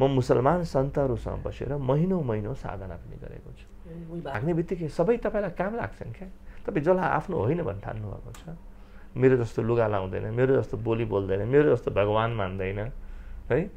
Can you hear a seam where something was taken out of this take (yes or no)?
yes